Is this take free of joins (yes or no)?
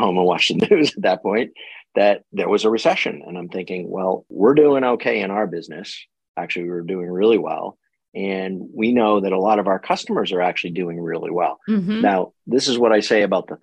no